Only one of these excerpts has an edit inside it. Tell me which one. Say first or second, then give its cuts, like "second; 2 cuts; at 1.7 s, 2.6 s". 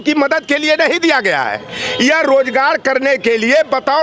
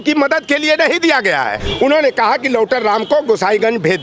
second; 1 cut; at 1.6 s